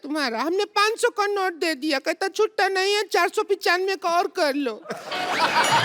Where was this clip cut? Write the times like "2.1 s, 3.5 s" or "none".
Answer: none